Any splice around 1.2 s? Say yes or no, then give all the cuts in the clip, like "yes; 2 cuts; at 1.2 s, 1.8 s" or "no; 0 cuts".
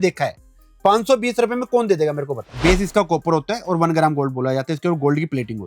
no; 1 cut; at 2.4 s